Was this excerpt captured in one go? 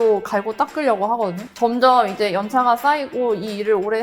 no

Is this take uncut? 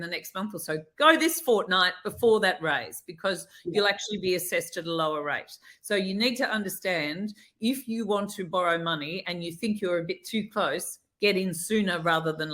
yes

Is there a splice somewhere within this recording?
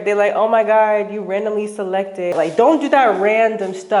yes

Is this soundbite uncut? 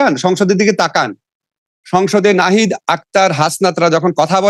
yes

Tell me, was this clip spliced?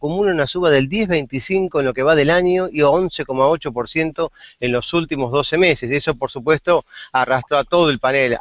yes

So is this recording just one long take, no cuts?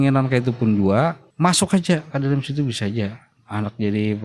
no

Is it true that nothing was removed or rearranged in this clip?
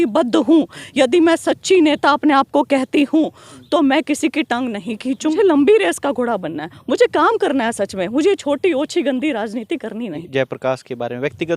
no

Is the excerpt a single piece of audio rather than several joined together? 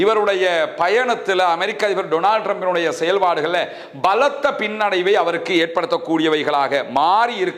yes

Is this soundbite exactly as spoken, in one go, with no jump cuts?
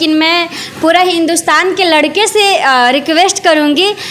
yes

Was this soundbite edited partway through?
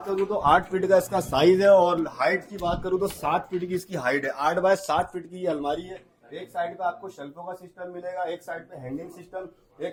no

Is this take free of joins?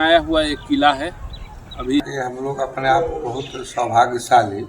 no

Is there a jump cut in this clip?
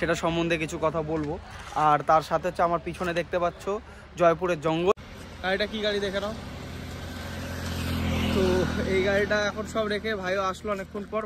yes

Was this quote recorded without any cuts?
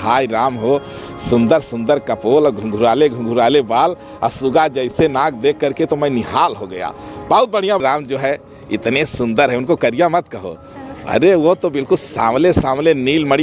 no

